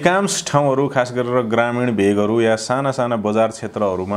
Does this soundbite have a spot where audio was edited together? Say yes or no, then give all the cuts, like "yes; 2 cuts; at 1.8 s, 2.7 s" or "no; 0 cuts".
no; 0 cuts